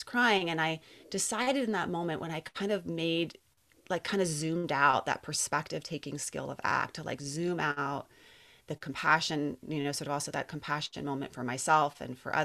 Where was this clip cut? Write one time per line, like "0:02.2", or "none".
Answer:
none